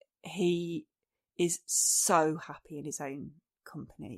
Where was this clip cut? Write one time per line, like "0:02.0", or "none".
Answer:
none